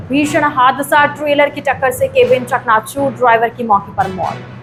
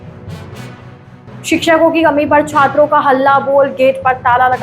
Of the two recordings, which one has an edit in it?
second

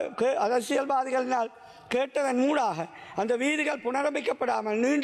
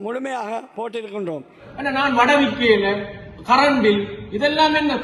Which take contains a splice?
second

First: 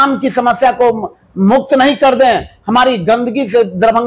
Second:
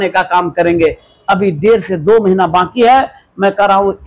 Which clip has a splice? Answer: second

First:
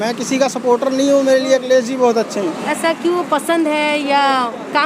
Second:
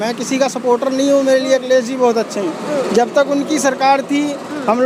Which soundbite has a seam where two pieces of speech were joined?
first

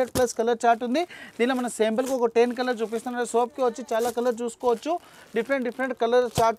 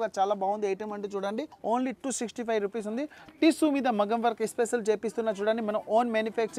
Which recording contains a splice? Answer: second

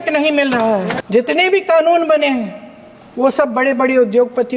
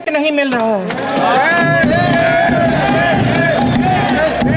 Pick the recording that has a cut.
first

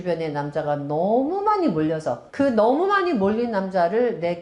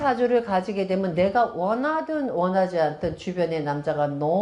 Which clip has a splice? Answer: first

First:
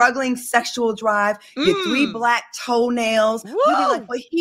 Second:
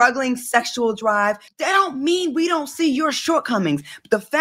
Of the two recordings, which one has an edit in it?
second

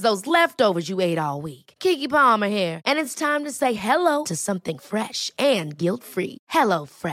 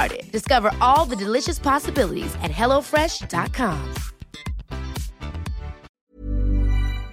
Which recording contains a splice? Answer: second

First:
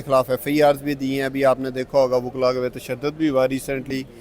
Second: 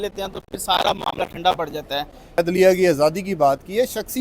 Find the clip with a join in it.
second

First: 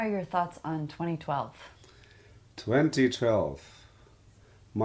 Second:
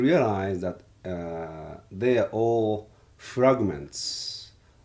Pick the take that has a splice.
second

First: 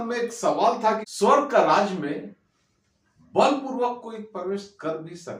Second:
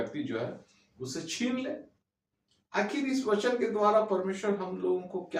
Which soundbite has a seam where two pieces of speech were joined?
first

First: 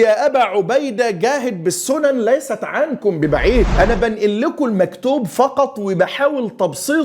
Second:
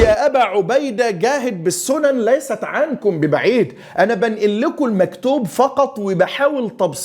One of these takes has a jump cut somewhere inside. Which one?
first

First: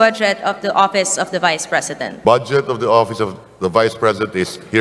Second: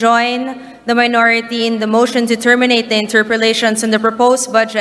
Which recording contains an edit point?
first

